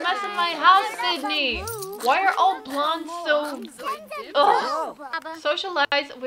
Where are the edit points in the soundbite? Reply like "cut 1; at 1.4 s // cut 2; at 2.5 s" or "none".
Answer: cut 1; at 5.1 s